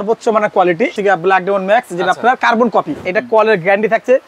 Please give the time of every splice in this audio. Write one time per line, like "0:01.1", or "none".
0:01.0
0:03.0